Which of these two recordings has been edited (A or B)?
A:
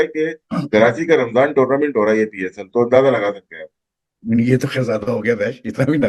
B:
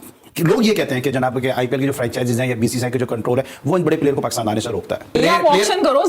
B